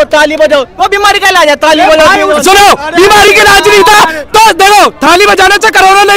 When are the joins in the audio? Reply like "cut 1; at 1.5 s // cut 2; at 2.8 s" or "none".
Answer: none